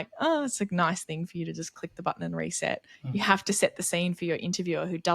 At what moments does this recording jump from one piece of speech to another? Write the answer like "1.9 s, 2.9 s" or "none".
2.9 s